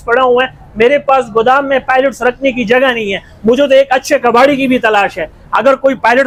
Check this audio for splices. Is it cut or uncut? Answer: uncut